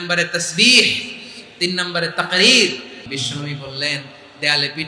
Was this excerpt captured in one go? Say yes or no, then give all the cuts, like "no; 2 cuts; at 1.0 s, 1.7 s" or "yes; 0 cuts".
no; 1 cut; at 3.2 s